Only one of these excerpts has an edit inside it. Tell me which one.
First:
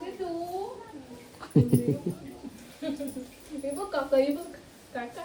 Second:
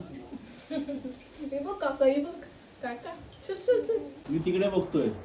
second; 1 cut; at 4.1 s

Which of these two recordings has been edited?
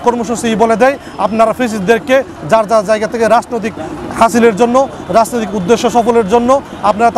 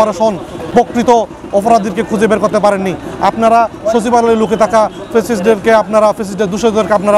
second; 1 cut; at 0.9 s

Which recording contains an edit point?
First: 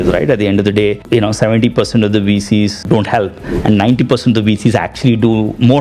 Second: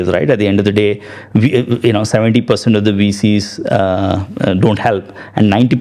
first; 2 cuts; at 1.0 s, 2.9 s

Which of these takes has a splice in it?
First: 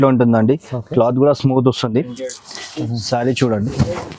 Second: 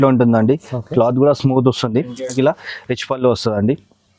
second; 1 cut; at 2.3 s

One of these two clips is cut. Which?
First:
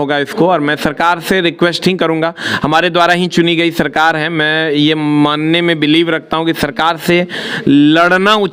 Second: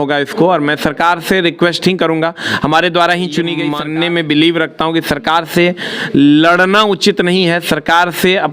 second; 1 cut; at 3.7 s

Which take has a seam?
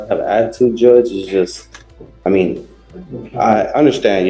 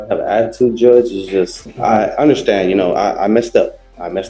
second; 1 cut; at 1.6 s

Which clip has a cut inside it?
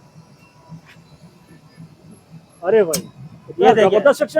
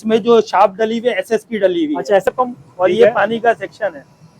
second; 1 cut; at 2.3 s

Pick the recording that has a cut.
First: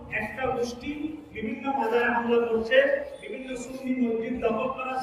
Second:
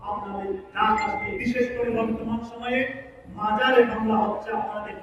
second; 1 cut; at 1.3 s

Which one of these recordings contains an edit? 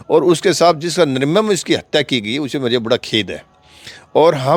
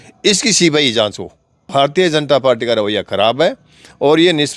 second; 1 cut; at 1.7 s

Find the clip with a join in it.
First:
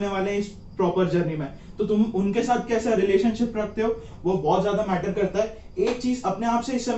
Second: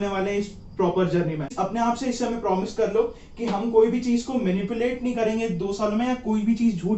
second; 1 cut; at 1.5 s

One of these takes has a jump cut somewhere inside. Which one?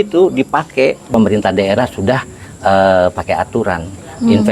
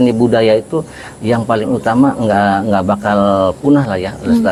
first; 1 cut; at 1.0 s

